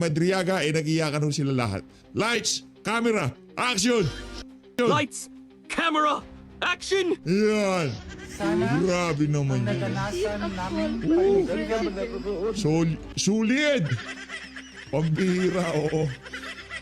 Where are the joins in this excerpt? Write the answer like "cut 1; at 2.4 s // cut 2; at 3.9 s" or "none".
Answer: cut 1; at 4.8 s